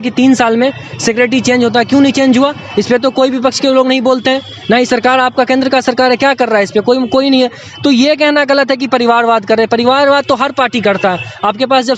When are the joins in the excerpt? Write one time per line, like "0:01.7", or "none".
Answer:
none